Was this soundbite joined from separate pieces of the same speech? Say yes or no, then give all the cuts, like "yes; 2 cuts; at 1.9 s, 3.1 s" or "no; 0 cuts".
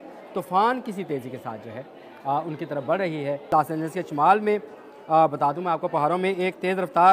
yes; 1 cut; at 3.5 s